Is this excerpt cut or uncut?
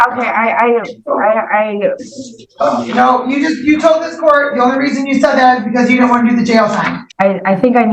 cut